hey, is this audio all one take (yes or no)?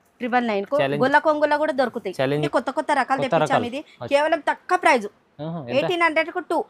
no